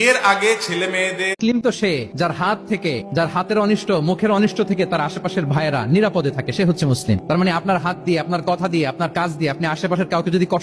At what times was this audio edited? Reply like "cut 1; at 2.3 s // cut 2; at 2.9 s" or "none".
cut 1; at 1.4 s